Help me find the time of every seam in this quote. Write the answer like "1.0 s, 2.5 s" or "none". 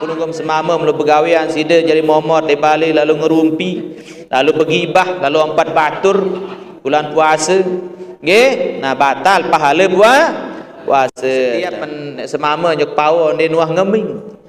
11.6 s